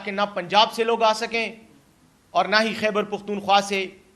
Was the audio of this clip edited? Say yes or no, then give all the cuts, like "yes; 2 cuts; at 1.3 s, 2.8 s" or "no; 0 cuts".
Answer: no; 0 cuts